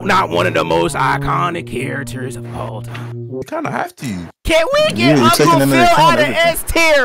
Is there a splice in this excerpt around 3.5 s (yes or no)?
yes